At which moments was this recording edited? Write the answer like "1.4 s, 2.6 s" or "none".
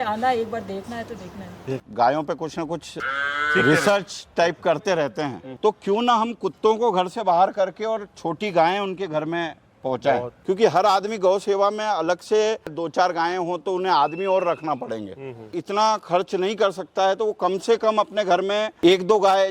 1.8 s, 2.9 s, 5.4 s, 10.3 s, 12.8 s, 15.6 s, 18.7 s